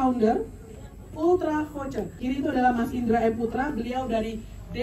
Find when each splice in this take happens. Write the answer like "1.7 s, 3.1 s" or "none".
2.2 s